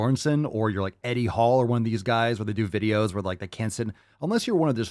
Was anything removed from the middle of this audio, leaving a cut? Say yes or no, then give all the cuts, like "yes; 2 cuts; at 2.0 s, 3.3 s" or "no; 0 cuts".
no; 0 cuts